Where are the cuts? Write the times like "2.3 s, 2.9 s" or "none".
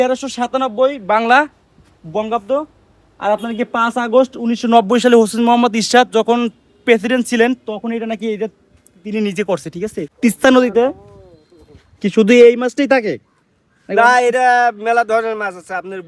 10.0 s